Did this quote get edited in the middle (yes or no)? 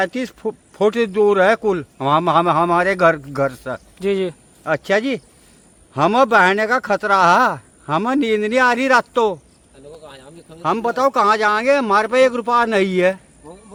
no